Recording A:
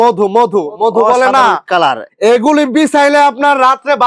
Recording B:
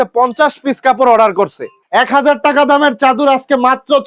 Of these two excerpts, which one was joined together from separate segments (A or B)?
B